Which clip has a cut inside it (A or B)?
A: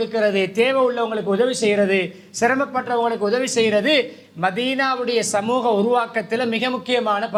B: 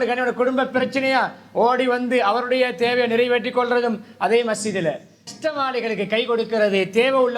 B